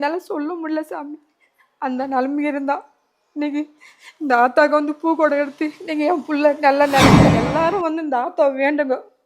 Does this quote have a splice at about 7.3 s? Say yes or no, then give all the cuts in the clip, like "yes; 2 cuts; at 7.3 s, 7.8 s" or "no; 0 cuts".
yes; 1 cut; at 7.3 s